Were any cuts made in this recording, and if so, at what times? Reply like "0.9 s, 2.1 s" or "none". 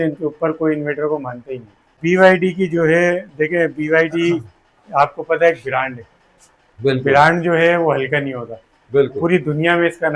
1.9 s

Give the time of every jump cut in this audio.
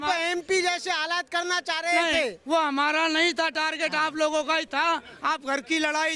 none

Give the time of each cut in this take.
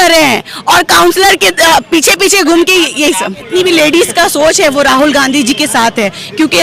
3.5 s

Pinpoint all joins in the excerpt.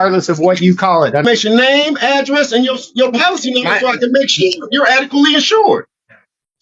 1.2 s

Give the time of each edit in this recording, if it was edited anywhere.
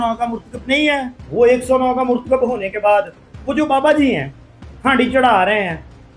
1.2 s

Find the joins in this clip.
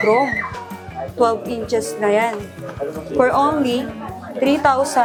none

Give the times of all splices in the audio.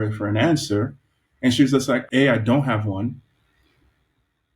2.0 s

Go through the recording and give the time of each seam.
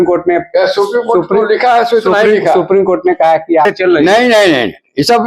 3.6 s

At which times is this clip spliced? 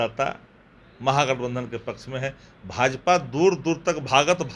none

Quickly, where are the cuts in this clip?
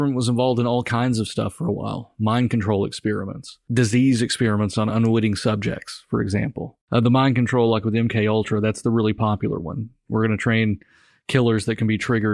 3.5 s, 6.7 s

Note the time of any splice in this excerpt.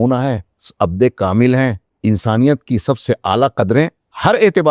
1.9 s

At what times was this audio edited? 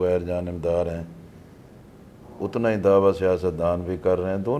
none

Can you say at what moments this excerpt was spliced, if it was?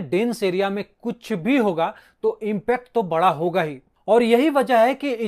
none

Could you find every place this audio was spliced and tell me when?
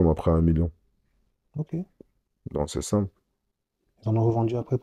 none

